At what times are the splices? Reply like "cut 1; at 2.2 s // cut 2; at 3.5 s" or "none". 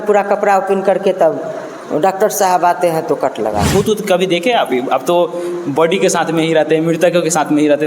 cut 1; at 3.7 s